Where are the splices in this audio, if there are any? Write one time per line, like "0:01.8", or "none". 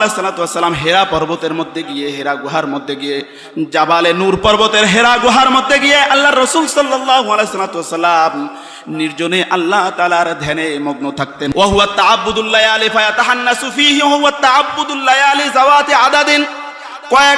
0:11.5